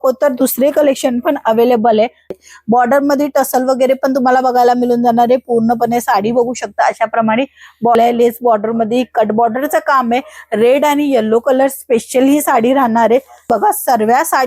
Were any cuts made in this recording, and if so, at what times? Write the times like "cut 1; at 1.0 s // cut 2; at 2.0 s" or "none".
cut 1; at 2.3 s // cut 2; at 7.9 s // cut 3; at 13.5 s